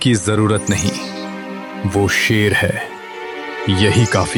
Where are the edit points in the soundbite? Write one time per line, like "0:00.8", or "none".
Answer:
none